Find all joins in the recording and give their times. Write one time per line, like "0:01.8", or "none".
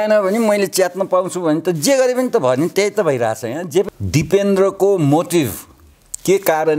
0:03.9